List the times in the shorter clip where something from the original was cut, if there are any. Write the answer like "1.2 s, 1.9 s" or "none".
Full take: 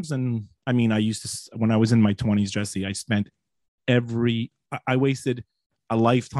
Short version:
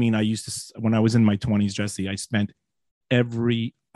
none